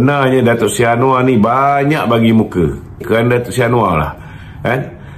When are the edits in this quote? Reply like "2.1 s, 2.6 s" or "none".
3.0 s